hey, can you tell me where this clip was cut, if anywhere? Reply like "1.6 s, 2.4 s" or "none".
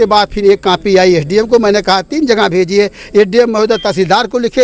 none